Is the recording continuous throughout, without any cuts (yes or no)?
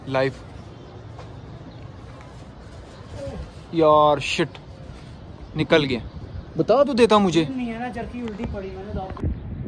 yes